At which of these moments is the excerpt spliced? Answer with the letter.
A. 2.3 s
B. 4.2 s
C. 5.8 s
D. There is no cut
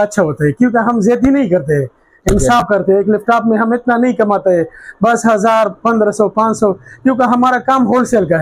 D